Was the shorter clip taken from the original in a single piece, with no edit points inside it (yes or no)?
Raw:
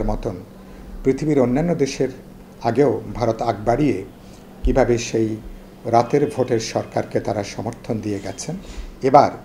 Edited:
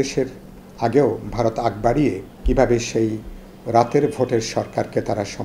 no